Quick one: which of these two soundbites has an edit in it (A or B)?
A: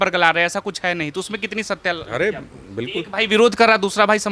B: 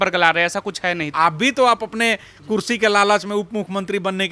B